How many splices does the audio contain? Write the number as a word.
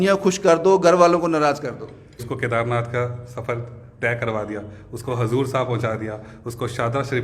one